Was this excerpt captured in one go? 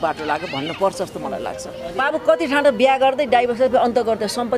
no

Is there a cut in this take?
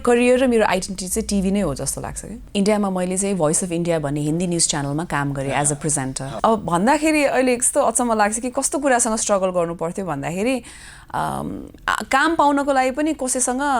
yes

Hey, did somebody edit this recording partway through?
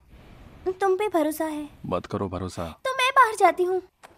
yes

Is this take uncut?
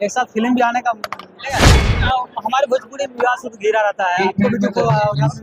no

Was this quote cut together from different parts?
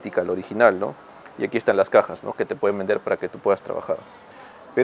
no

